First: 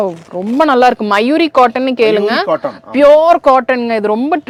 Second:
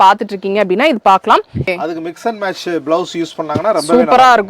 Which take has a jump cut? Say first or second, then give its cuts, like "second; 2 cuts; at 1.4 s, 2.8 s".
second; 1 cut; at 1.7 s